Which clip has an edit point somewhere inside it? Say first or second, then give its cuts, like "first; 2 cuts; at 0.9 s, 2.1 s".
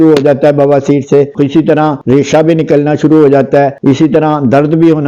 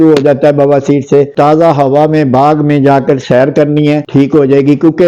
second; 2 cuts; at 1.3 s, 4.0 s